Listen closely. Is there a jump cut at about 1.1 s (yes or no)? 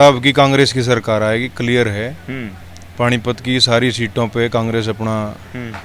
no